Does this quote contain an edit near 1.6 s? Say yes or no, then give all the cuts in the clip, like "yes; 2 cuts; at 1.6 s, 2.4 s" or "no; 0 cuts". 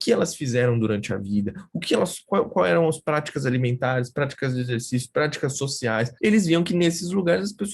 no; 1 cut; at 6.1 s